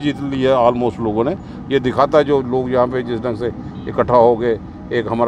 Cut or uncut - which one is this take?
uncut